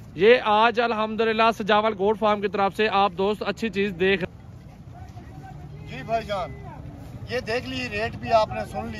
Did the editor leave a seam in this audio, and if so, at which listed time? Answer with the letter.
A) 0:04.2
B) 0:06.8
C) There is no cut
A